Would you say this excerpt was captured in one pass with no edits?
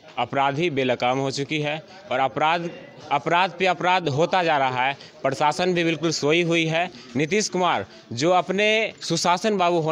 yes; 0 cuts

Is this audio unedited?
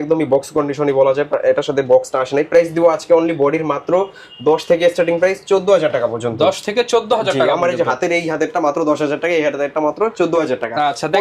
yes; 0 cuts

